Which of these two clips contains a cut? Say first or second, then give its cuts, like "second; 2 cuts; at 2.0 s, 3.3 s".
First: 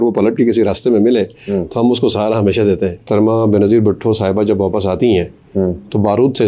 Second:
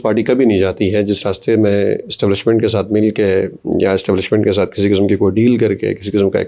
first; 1 cut; at 3.1 s